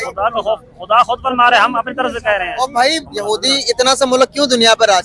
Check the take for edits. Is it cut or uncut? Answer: cut